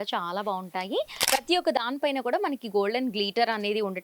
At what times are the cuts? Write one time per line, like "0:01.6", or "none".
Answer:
0:01.2